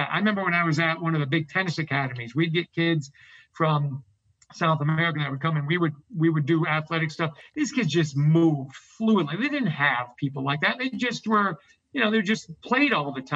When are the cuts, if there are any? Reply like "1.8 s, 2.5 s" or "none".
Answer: none